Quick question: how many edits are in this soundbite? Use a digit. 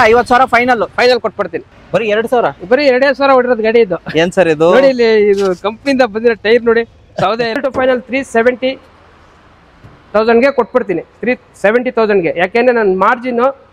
2